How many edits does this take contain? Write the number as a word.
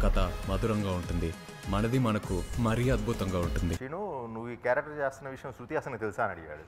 one